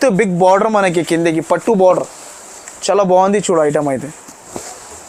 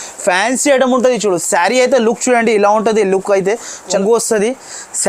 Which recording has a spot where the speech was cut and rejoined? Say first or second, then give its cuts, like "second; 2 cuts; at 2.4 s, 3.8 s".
second; 1 cut; at 4.0 s